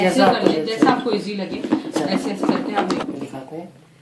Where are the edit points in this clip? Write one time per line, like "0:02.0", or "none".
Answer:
0:03.0